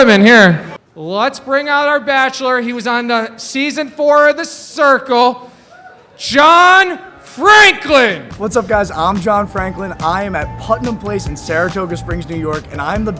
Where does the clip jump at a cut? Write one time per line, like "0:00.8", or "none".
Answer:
none